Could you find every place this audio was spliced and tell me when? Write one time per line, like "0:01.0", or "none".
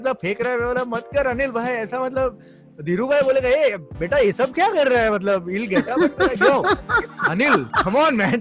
none